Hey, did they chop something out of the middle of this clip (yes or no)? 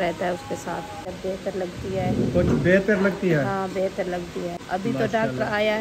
yes